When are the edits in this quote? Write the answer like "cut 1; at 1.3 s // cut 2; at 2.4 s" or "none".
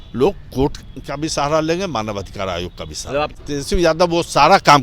cut 1; at 3.3 s